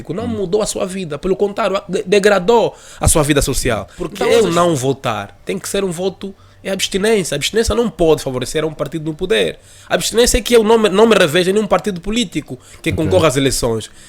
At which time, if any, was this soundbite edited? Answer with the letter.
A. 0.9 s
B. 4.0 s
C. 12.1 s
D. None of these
B